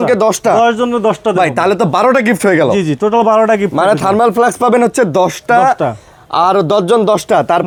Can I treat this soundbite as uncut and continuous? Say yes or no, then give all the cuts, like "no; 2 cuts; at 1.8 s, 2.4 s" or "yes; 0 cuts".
yes; 0 cuts